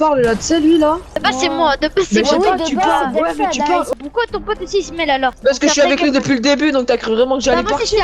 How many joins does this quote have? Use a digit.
3